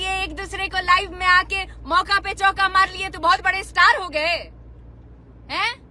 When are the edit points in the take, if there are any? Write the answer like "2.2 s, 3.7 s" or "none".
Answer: none